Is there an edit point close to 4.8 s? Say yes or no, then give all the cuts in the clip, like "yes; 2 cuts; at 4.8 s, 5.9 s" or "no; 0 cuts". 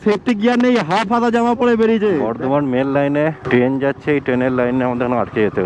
no; 2 cuts; at 2.3 s, 3.4 s